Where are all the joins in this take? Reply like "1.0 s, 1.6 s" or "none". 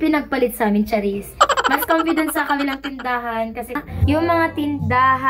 3.8 s